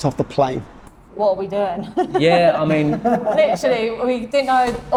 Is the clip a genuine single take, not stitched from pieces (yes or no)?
yes